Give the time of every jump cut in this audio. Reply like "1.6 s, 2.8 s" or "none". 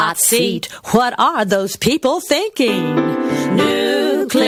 none

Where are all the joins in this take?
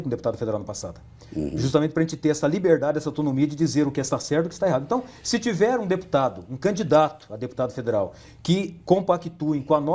none

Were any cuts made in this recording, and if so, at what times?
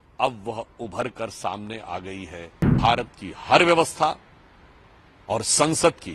2.8 s

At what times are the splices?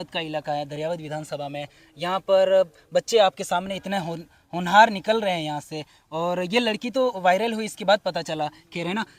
none

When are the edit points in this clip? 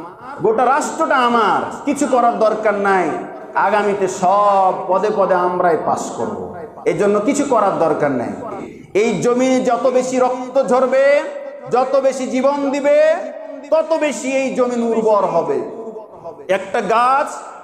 8.7 s

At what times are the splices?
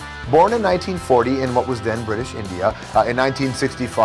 1.1 s

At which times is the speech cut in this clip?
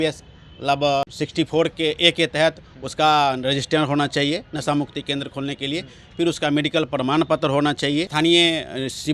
1.0 s, 8.1 s

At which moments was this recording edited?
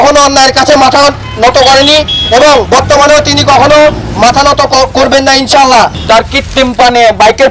5.9 s

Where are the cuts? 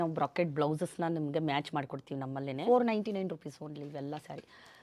2.6 s

